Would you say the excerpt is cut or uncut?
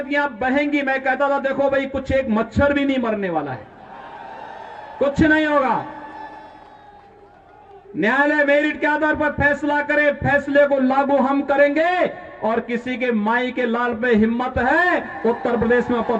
uncut